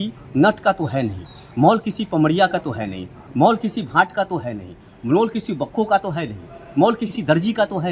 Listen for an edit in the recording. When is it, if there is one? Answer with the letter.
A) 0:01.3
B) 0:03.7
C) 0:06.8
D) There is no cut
D